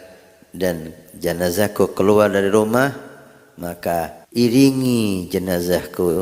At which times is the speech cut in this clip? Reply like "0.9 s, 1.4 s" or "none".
4.2 s